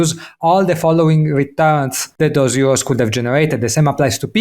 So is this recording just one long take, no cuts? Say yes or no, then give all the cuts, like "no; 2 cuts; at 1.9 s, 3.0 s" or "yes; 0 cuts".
no; 1 cut; at 2.0 s